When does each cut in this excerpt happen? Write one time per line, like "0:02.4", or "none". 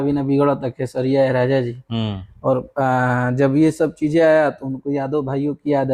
none